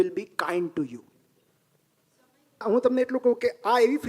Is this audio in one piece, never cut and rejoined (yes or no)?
no